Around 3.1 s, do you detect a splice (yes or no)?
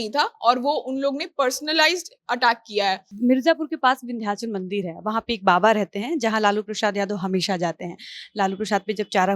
yes